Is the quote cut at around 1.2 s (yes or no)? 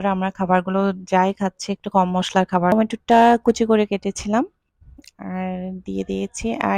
no